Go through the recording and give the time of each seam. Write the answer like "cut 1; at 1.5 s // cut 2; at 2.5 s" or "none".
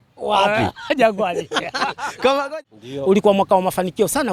cut 1; at 2.5 s